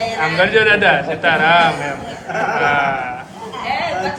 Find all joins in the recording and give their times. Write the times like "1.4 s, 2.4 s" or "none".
none